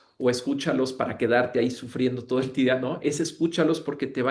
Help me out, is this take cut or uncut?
uncut